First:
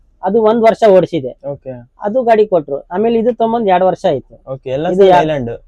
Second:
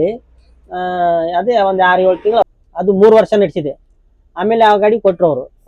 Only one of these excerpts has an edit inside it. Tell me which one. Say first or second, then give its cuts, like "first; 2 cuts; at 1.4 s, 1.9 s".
second; 1 cut; at 2.4 s